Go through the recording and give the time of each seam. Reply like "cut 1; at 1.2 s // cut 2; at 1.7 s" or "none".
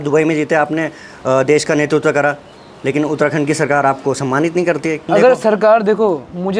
cut 1; at 5.0 s